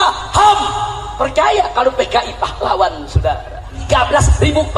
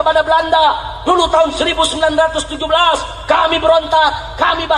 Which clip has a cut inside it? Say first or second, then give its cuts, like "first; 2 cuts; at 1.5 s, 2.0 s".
first; 1 cut; at 3.8 s